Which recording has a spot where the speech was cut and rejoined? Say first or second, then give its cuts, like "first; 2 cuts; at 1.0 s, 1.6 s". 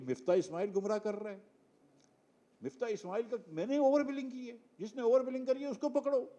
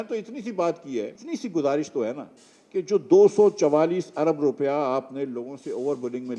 second; 1 cut; at 1.2 s